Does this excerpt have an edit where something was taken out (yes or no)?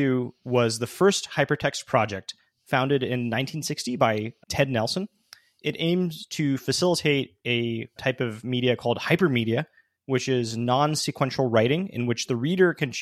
yes